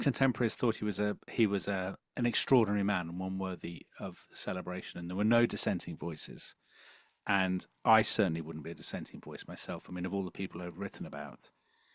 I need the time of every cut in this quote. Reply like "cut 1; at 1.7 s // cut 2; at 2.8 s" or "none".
none